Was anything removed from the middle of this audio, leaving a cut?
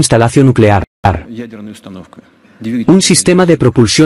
no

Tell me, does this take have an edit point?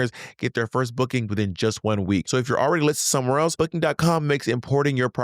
yes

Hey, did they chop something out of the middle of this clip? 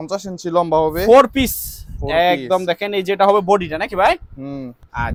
no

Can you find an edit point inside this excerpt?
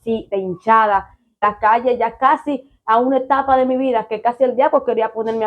yes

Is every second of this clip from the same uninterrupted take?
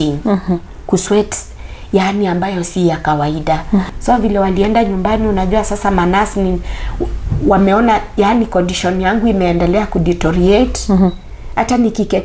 no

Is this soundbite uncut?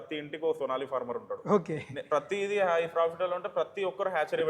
yes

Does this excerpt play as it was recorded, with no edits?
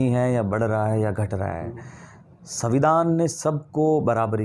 yes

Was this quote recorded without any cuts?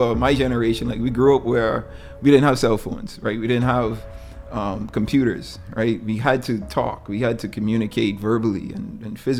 yes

